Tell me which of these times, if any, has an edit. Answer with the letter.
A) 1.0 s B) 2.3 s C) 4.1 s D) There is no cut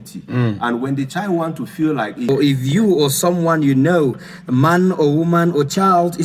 B